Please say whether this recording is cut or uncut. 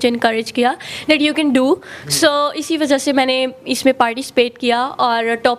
uncut